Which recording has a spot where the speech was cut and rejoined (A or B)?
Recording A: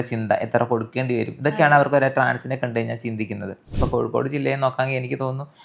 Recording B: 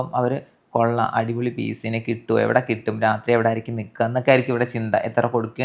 A